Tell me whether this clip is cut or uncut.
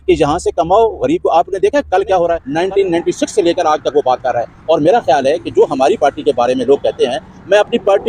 cut